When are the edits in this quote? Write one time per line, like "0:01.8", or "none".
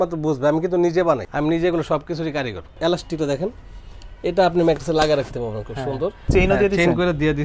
0:01.3
0:02.8
0:06.3